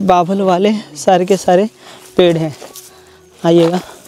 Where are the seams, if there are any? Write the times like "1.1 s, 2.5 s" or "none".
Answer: none